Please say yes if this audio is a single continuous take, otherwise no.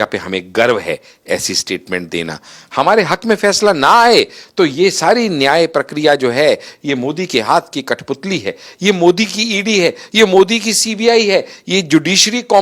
yes